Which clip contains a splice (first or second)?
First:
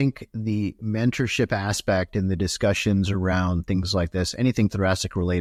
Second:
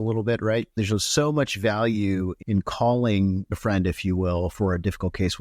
second